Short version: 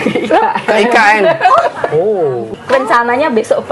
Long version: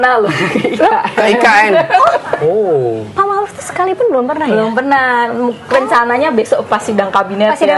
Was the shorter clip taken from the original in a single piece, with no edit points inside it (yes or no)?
no